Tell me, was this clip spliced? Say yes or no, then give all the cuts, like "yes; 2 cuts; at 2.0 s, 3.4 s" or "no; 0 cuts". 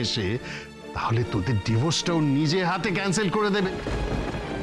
yes; 1 cut; at 3.7 s